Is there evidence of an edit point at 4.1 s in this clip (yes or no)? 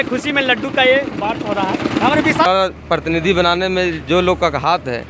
no